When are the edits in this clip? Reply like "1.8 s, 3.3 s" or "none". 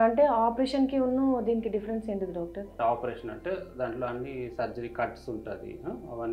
2.7 s